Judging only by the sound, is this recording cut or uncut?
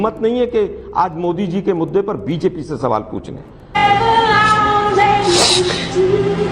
uncut